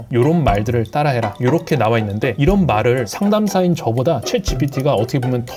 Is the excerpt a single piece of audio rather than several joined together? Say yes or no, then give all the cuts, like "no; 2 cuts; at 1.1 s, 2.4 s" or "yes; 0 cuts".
yes; 0 cuts